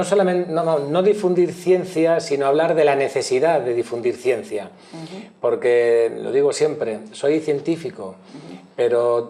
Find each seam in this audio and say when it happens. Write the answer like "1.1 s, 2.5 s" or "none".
4.3 s

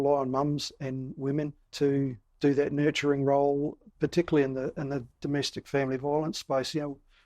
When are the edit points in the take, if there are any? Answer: 1.9 s, 3.8 s

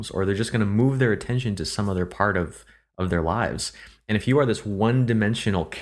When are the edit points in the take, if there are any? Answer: none

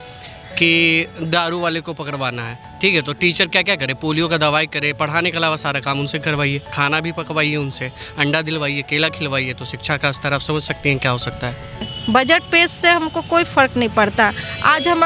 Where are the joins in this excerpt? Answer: 11.9 s

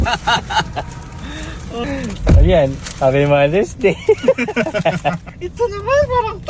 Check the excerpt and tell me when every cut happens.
1.8 s, 5.3 s

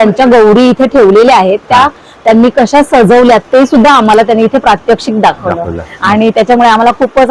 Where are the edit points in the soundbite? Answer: none

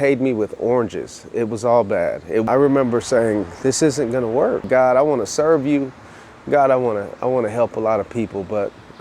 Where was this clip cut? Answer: 2.4 s, 4.6 s

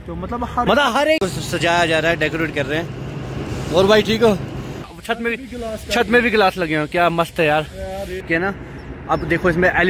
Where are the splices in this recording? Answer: 1.2 s, 4.9 s, 8.2 s

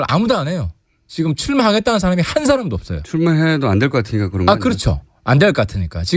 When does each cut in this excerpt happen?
5.0 s

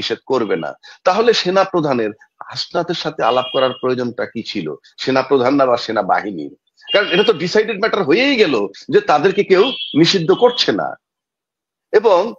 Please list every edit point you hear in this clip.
none

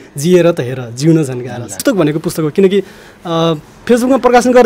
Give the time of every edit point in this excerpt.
1.8 s

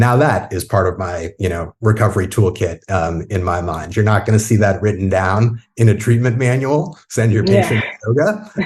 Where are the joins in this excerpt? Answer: none

